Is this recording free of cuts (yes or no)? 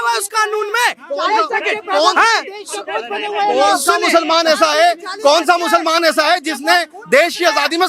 yes